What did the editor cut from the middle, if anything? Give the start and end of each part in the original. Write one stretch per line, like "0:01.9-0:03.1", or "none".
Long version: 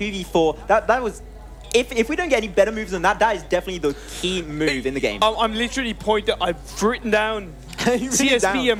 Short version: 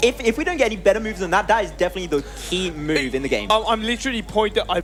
none